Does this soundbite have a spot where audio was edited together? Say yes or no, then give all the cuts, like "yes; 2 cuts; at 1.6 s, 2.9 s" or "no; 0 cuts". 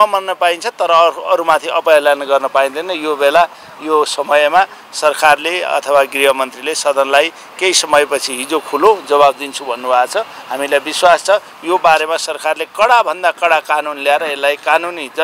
no; 0 cuts